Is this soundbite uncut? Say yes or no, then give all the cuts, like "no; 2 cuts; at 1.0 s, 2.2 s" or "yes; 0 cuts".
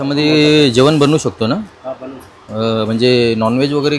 yes; 0 cuts